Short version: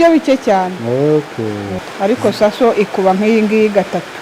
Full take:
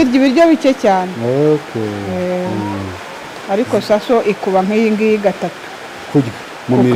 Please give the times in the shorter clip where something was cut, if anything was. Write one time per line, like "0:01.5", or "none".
0:01.7